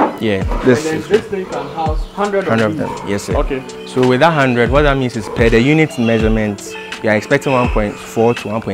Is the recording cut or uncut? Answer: uncut